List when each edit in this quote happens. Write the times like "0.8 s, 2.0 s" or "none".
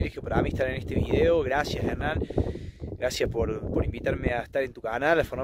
none